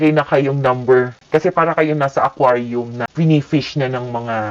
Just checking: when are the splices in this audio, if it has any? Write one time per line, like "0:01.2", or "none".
0:01.2
0:03.0

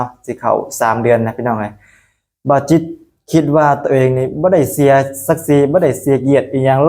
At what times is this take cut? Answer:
none

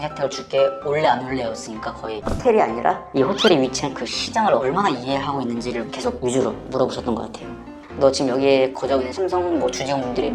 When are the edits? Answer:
0:02.3
0:07.8

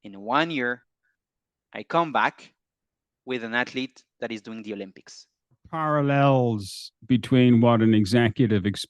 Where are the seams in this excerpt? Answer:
0:05.7

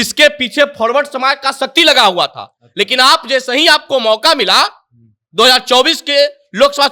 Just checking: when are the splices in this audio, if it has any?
none

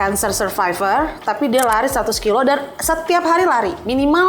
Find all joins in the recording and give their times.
none

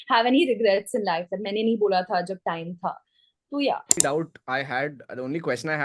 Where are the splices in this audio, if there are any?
0:04.0

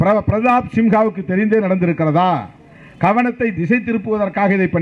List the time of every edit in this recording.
none

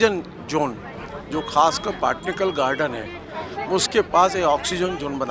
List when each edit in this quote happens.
none

